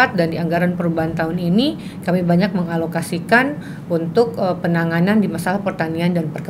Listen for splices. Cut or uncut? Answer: uncut